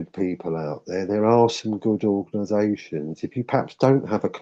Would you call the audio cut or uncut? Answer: uncut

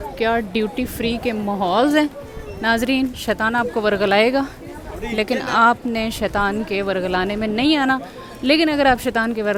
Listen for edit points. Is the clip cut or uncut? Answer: uncut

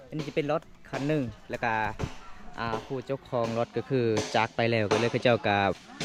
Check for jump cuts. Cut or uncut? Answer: uncut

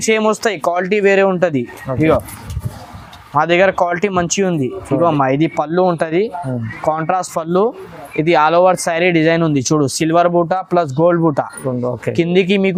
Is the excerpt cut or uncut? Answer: uncut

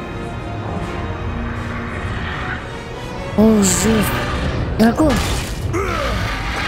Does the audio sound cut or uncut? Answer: uncut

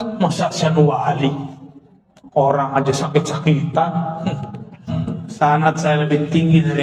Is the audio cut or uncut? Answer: cut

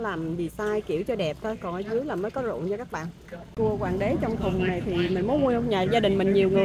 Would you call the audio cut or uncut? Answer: cut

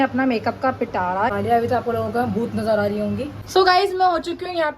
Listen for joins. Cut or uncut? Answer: cut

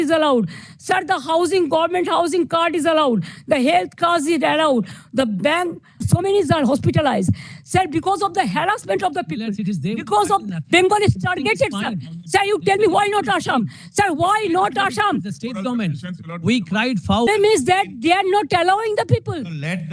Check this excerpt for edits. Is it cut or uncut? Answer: cut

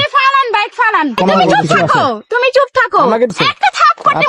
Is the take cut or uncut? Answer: cut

